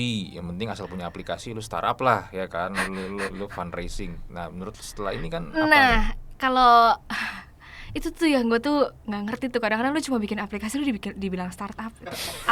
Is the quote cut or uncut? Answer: uncut